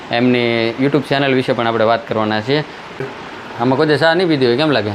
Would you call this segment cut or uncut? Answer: cut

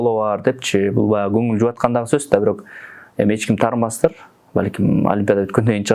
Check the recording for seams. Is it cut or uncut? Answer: uncut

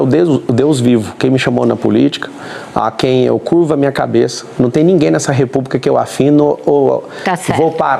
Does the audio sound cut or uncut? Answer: uncut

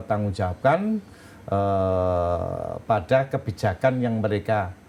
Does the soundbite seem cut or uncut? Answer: uncut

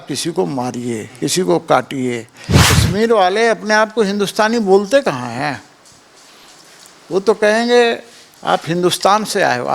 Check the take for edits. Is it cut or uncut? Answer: cut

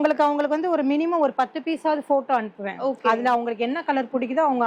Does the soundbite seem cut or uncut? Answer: uncut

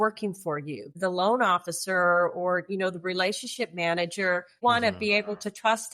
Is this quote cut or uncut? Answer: cut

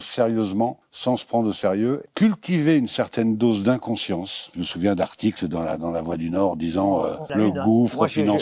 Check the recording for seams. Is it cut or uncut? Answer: cut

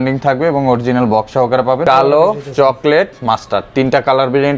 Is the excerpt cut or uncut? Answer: cut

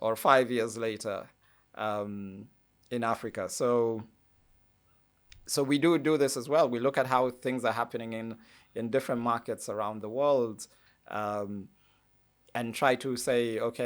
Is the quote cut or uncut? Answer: uncut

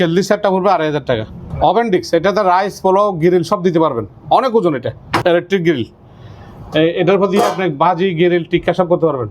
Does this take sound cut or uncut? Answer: cut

